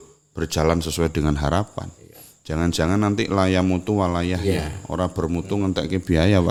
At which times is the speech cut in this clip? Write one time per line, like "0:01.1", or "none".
none